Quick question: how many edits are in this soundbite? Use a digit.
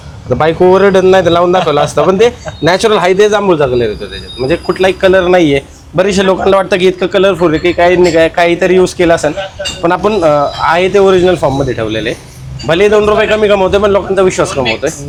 0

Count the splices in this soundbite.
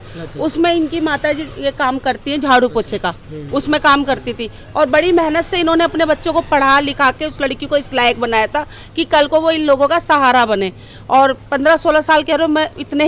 0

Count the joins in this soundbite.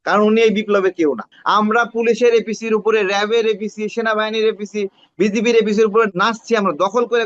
2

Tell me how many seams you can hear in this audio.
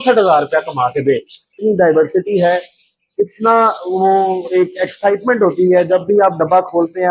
1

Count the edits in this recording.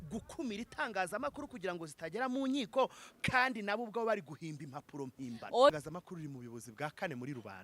1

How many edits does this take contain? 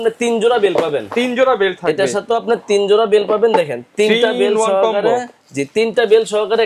0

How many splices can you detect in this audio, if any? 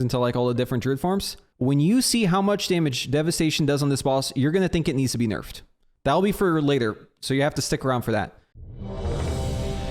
3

